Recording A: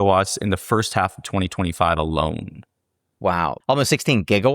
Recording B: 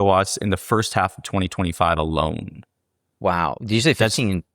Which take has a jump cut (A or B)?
A